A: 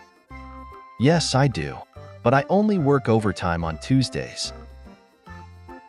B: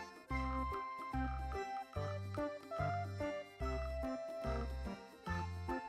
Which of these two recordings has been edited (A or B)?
A